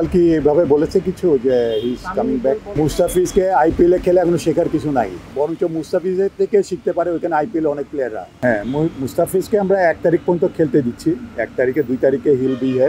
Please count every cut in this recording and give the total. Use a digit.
3